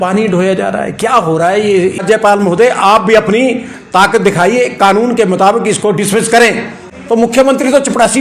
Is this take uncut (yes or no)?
no